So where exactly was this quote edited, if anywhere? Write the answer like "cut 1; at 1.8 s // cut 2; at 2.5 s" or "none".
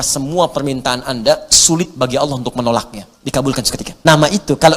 cut 1; at 3.8 s